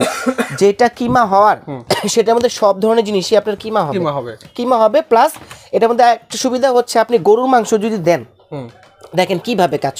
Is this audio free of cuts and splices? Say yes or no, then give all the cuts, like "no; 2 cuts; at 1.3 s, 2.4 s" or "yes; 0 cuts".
yes; 0 cuts